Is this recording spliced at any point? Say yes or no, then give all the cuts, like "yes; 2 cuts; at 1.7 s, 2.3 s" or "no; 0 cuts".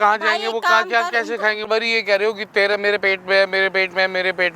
yes; 1 cut; at 1.6 s